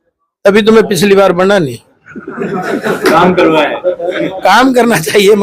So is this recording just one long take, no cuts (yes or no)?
yes